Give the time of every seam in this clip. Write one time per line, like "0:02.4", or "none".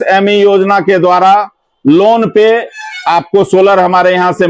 none